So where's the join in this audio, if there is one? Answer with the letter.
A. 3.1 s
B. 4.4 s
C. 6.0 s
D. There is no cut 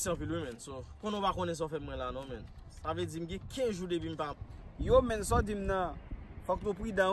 B